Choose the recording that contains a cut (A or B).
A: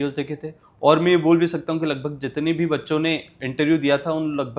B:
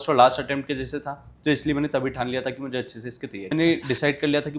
B